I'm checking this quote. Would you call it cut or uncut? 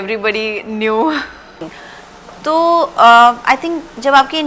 cut